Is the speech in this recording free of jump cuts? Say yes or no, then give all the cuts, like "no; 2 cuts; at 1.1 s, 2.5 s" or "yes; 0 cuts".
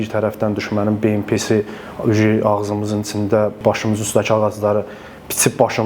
no; 1 cut; at 3.6 s